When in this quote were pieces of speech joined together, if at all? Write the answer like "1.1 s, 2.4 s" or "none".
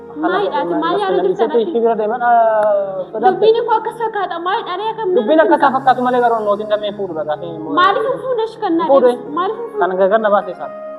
none